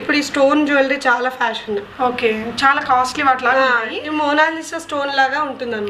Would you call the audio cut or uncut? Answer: uncut